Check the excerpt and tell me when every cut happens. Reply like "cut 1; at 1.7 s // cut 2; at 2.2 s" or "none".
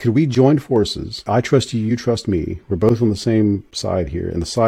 cut 1; at 1.3 s